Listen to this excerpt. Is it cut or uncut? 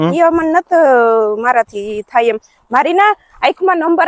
uncut